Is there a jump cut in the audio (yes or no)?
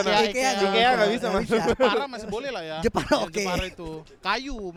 no